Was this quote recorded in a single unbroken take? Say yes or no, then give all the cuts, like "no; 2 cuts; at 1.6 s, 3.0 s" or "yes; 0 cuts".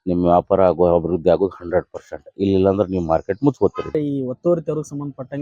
no; 1 cut; at 3.9 s